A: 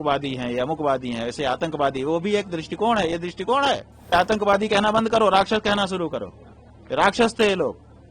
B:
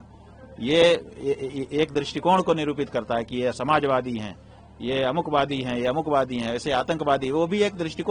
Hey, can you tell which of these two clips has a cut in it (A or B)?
A